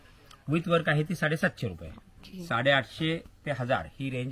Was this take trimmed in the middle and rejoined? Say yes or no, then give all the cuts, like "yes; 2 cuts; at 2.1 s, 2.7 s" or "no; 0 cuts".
yes; 1 cut; at 2.3 s